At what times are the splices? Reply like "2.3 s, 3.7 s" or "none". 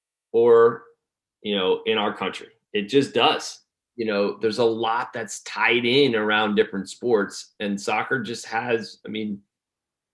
3.6 s